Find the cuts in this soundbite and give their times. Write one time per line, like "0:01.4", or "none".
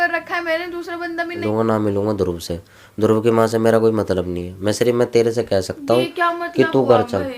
0:01.4